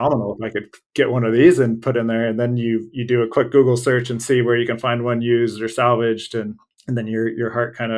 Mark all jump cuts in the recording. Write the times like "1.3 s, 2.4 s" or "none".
none